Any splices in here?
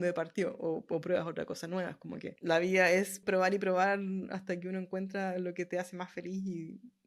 yes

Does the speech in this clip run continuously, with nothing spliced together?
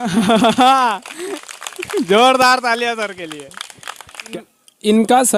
no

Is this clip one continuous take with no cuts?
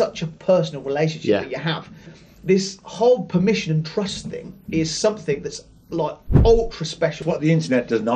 no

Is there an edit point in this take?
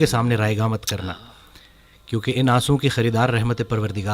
no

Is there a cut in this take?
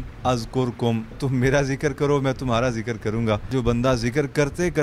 yes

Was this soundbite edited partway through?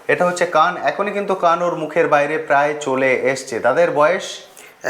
no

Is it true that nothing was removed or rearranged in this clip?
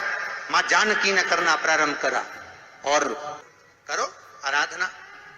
no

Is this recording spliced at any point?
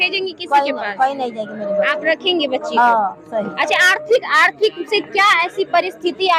no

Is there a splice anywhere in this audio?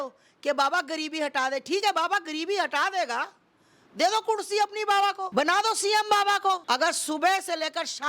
yes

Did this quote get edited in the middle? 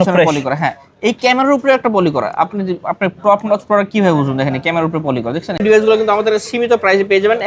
yes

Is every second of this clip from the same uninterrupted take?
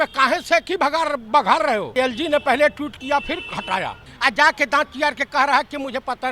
no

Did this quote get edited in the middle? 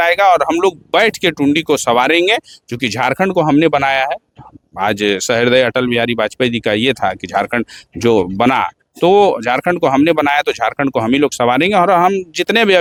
no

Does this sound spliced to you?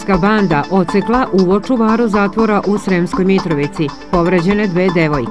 no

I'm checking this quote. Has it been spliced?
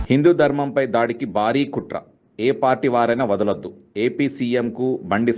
no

